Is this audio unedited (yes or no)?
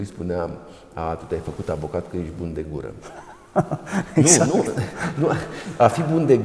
yes